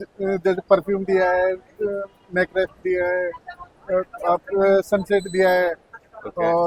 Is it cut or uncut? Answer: uncut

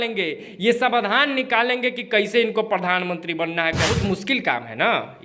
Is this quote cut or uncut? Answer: cut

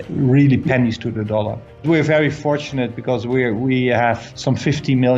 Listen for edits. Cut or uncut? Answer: cut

